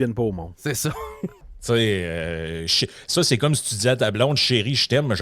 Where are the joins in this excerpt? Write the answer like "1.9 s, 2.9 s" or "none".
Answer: 1.5 s

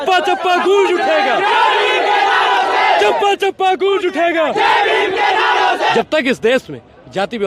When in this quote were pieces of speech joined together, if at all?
5.9 s

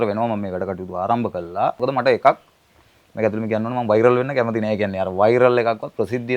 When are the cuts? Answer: 1.8 s

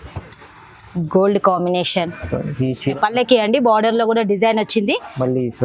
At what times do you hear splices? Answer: 2.9 s

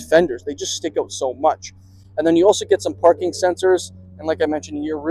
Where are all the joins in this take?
none

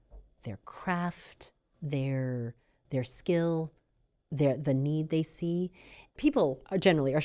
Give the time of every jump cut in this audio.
6.2 s

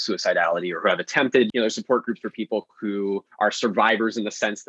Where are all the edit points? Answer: 1.5 s, 3.3 s

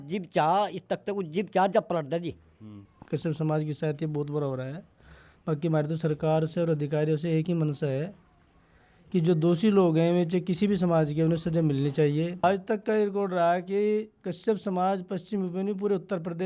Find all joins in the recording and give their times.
2.9 s, 12.4 s

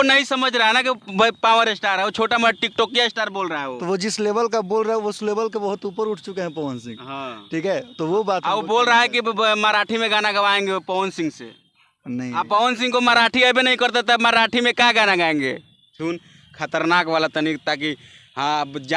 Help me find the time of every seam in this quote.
15.9 s

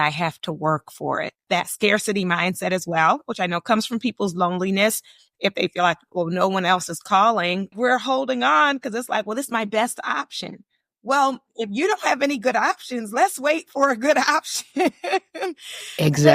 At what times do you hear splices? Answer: 1.4 s, 7.8 s

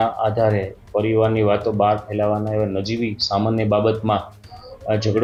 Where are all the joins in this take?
none

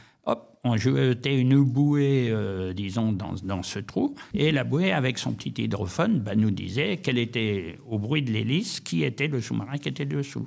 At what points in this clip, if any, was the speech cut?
4.2 s

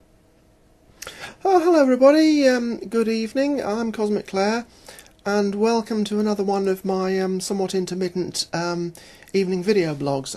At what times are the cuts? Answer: none

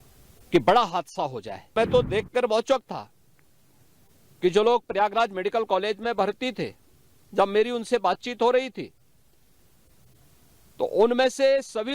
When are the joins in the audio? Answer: 1.7 s

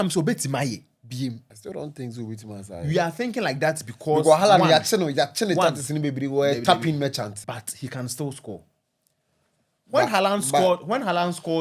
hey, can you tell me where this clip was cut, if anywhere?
7.4 s

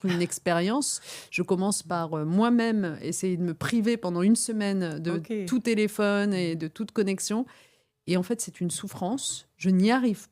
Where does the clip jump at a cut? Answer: none

